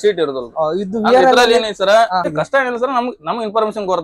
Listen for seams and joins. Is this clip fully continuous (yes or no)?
no